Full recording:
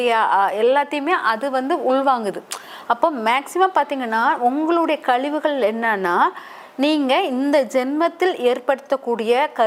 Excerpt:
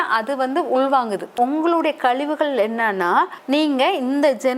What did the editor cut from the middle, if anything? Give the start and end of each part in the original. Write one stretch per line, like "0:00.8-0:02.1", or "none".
0:02.5-0:04.4
0:06.4-0:06.7